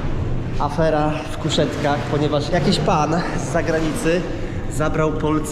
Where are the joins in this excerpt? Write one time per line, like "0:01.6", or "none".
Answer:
none